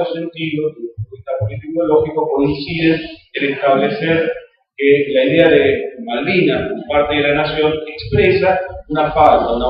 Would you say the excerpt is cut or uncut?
uncut